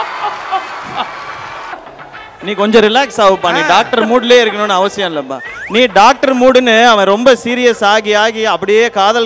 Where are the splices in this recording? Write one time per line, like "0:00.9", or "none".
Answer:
0:01.8